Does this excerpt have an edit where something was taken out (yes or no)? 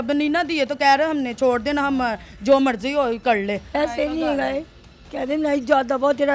yes